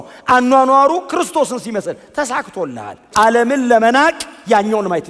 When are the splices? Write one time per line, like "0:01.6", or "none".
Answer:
0:03.0

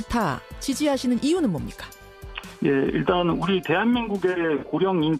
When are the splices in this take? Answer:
0:02.7

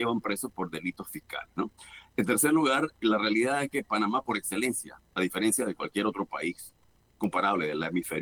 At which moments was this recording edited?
none

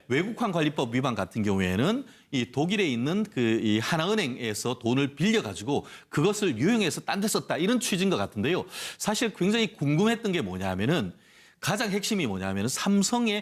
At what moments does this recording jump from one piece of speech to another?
0:06.0

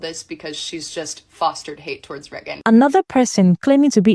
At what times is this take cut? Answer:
0:02.5

